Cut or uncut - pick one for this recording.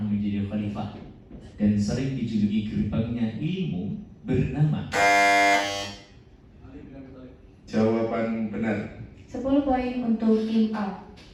uncut